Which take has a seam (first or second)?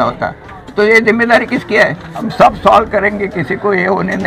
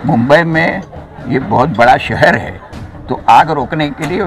first